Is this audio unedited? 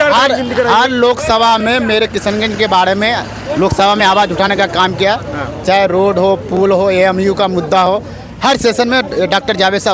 yes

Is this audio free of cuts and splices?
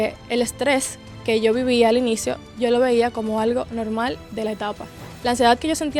yes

